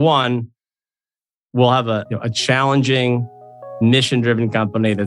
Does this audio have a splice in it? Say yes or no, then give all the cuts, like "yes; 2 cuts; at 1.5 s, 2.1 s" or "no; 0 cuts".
no; 0 cuts